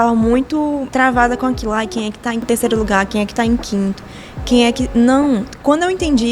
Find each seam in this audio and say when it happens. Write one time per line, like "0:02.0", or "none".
0:00.9
0:02.4
0:05.5